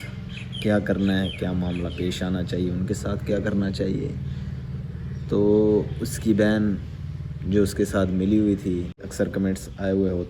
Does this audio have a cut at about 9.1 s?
yes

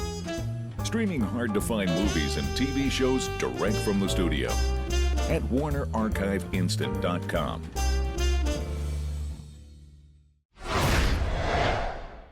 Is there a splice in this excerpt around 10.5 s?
yes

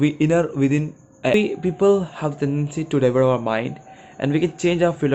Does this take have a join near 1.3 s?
yes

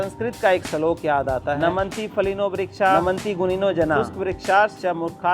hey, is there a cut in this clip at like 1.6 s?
yes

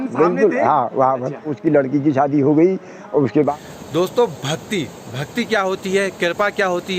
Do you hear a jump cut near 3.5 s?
yes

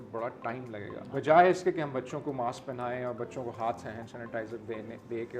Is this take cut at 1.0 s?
yes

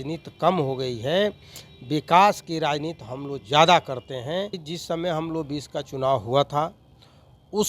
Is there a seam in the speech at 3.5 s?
no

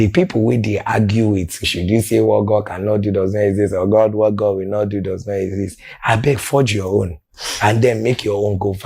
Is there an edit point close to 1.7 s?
yes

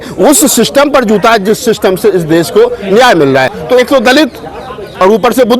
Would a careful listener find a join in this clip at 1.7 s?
no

